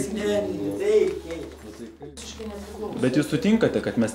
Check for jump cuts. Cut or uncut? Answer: cut